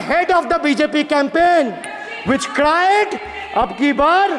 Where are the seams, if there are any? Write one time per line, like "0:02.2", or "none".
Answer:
none